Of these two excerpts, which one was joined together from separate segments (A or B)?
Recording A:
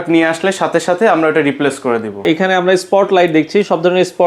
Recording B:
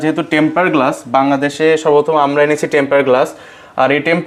A